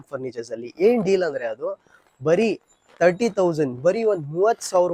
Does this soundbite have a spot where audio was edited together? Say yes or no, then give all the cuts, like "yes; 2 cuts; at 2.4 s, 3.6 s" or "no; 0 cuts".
no; 0 cuts